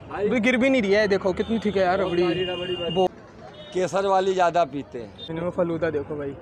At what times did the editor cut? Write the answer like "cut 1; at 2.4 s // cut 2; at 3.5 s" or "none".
cut 1; at 3.1 s // cut 2; at 5.3 s